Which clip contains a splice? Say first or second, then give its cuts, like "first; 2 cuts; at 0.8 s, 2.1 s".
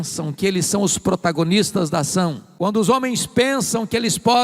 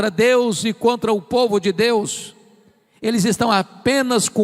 first; 1 cut; at 2.4 s